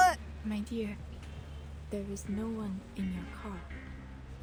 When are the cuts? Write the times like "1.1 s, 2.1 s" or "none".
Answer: none